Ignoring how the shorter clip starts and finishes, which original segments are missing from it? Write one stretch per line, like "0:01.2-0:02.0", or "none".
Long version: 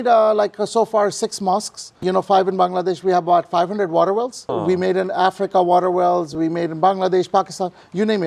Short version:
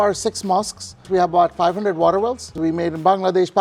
0:02.0-0:03.0
0:04.4-0:06.3